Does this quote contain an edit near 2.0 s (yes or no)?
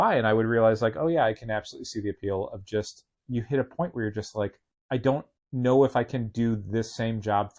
no